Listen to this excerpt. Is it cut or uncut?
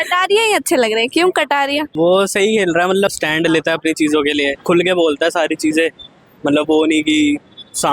cut